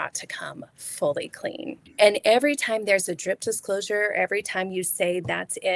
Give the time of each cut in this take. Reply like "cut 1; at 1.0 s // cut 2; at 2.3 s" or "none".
cut 1; at 1.8 s